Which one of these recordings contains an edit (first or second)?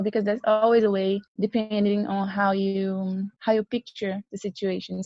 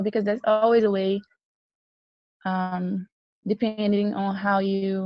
first